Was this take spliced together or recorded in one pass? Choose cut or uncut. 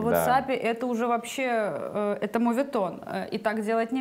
uncut